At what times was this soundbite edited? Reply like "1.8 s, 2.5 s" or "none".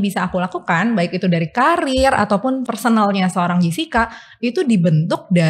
2.7 s